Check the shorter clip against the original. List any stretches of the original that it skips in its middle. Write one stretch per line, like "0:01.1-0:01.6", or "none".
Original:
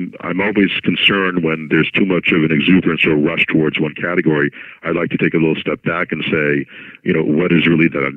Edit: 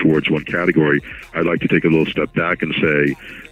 none